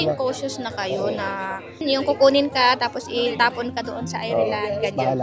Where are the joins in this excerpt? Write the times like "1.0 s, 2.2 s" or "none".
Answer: 1.8 s